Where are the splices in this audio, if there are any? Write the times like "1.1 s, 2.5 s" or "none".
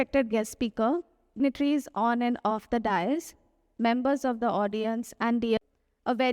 1.4 s, 5.6 s